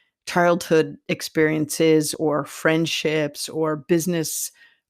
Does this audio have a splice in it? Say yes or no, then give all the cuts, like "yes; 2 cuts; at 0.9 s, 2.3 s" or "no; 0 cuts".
yes; 1 cut; at 2.1 s